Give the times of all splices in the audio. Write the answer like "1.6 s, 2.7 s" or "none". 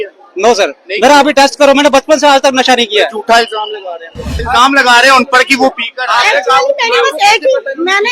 4.3 s